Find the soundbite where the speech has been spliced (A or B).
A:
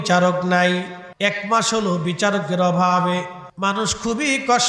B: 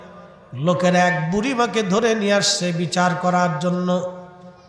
A